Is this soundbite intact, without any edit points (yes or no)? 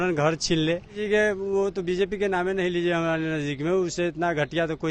no